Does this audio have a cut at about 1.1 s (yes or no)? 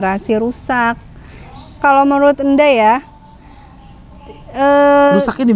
no